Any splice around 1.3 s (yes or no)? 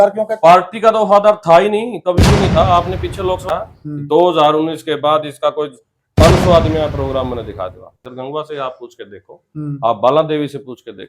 no